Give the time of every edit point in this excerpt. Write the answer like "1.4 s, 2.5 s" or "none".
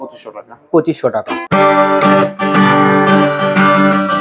1.4 s